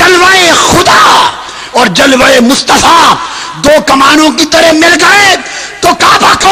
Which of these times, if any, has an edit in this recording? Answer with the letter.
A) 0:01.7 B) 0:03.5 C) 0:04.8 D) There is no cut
D